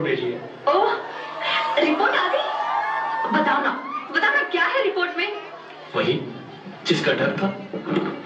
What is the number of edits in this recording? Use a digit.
1